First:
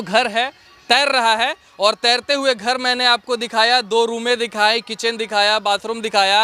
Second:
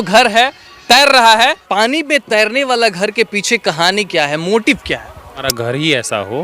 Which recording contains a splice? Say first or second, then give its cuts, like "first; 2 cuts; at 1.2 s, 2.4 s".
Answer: second; 2 cuts; at 1.6 s, 5.5 s